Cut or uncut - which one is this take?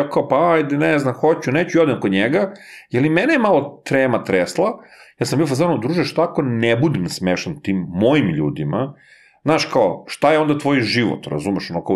uncut